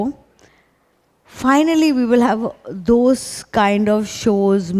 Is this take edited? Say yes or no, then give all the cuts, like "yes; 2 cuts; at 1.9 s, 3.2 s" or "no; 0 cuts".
no; 0 cuts